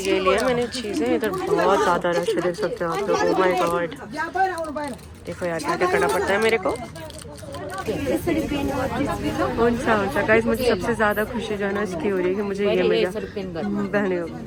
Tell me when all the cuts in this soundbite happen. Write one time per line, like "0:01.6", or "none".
none